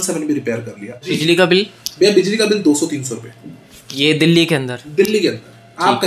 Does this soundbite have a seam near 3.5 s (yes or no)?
no